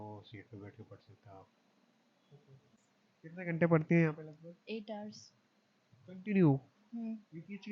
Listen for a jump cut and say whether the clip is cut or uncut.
cut